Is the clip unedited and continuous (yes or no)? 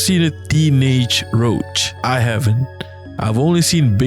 no